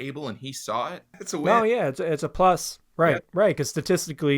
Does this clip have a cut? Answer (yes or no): yes